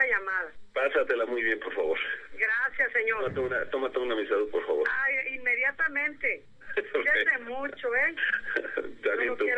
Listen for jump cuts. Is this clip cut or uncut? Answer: uncut